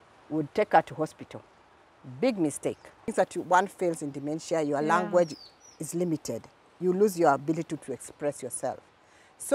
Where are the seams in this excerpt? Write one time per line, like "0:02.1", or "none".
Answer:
0:03.1